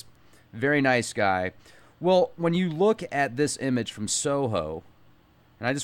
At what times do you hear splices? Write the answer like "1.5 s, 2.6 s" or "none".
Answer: 1.1 s